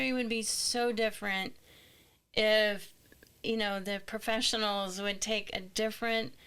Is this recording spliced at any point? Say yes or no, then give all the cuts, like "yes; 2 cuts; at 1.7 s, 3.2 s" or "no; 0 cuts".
no; 0 cuts